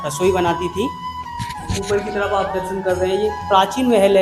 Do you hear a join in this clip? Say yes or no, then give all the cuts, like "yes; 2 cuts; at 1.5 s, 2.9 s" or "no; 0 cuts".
no; 0 cuts